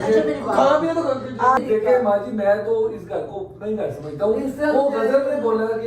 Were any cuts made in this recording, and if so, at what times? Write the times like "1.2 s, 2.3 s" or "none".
1.6 s